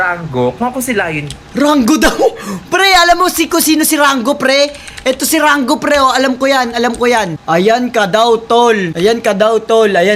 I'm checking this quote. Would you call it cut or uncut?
uncut